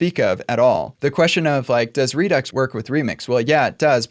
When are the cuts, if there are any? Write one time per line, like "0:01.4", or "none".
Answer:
0:00.9
0:02.5

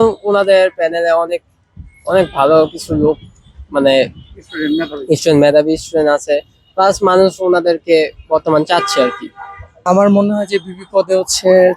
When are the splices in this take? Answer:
0:09.8

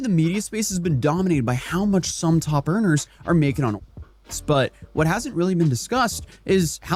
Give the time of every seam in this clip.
none

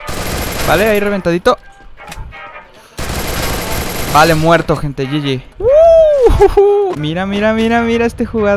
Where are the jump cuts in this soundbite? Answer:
0:05.5
0:07.0

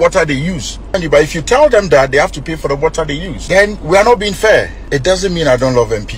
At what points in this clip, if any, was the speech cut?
0:01.0
0:04.8

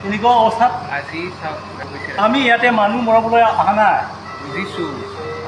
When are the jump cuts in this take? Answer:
0:01.8

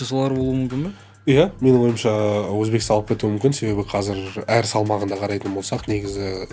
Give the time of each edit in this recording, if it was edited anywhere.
none

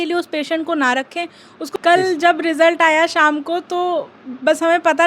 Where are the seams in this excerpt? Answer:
0:01.7

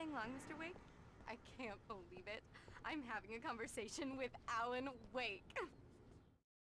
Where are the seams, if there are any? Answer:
0:05.7

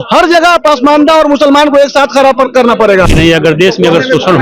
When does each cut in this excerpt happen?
0:03.1

